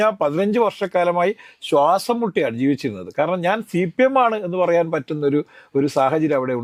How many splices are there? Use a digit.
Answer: 0